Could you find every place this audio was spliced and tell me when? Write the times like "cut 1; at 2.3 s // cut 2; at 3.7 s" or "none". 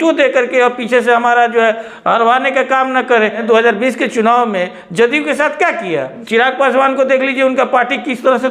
cut 1; at 3.4 s // cut 2; at 6.2 s